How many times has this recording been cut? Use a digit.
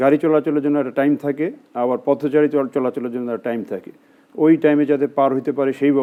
0